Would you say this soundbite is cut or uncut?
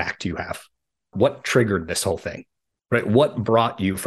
cut